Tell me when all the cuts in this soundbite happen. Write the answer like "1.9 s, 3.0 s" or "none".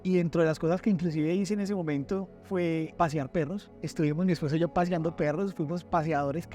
2.9 s, 3.8 s